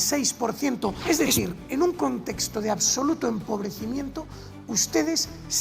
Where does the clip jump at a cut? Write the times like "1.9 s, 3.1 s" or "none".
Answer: 1.0 s